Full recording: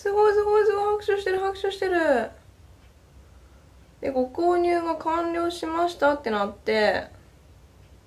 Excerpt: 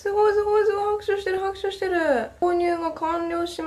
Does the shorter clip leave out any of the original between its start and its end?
yes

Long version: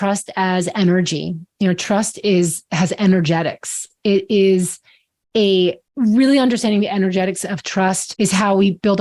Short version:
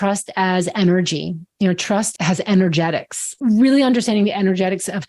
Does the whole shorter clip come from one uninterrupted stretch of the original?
no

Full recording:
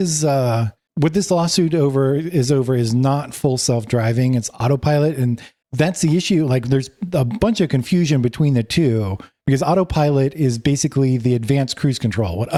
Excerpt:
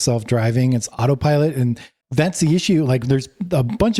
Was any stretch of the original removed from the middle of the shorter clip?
no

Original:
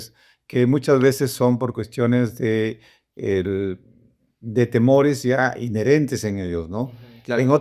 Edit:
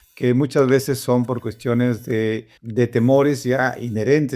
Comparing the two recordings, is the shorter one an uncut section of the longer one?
no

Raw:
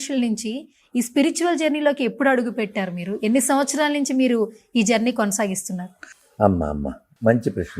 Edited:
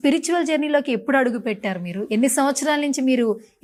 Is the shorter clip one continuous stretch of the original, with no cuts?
yes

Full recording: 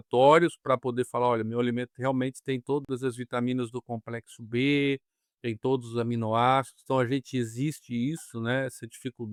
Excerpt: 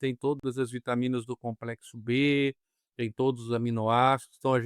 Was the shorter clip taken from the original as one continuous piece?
yes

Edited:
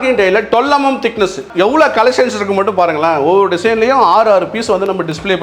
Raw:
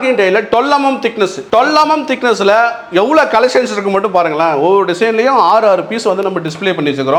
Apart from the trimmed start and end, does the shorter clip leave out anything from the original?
yes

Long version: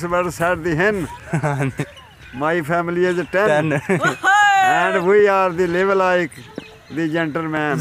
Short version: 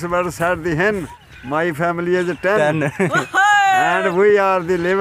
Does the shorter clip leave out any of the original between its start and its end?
yes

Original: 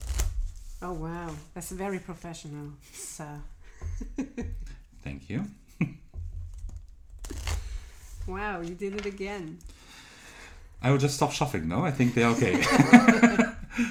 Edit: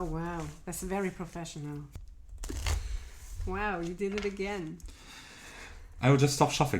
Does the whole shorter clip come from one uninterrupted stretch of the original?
no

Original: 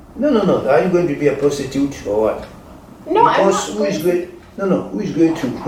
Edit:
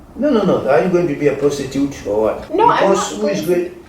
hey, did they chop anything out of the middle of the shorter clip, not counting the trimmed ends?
yes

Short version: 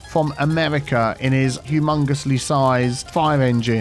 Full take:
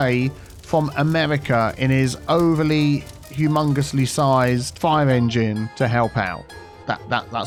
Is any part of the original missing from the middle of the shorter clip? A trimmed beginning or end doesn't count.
yes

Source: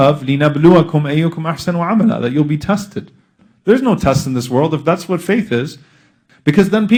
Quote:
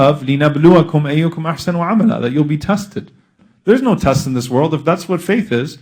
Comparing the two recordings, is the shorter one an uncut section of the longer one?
yes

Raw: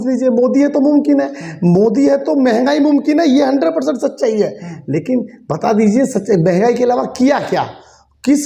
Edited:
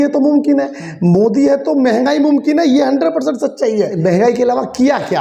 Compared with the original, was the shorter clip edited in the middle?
yes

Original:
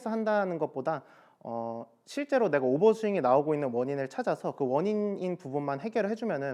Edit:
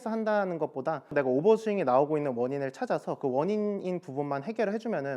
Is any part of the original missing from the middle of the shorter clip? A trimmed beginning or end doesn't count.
yes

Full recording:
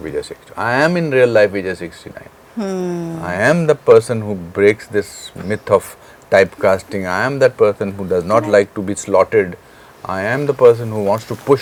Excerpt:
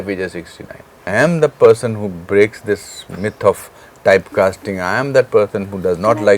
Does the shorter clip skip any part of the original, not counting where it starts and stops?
yes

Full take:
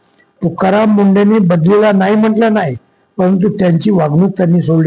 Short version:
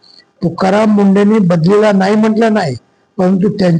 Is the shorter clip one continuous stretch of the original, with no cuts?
yes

